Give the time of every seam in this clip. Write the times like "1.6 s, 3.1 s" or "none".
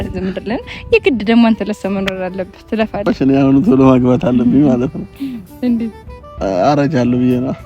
3.1 s